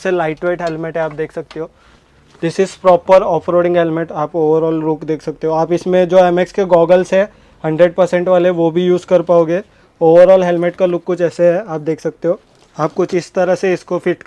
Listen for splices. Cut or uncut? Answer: cut